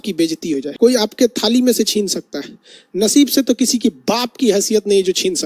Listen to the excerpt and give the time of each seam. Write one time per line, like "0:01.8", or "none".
0:01.0